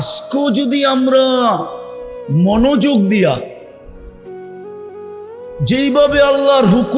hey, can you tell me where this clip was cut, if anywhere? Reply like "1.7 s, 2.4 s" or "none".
4.2 s, 5.6 s

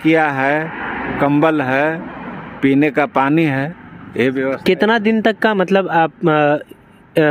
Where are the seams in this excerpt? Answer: none

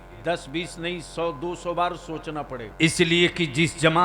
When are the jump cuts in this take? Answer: 2.7 s

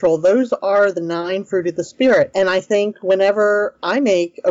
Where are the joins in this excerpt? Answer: 2.3 s

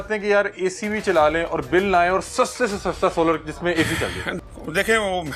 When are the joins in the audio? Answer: 4.2 s

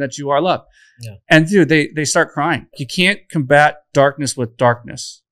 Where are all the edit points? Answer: 2.8 s

